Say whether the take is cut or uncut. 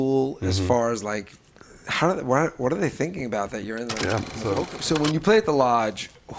cut